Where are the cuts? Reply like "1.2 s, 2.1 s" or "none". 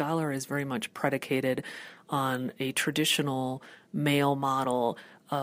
none